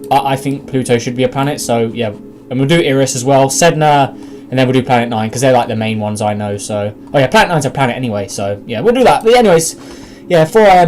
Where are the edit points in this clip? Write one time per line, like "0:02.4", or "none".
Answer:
0:06.2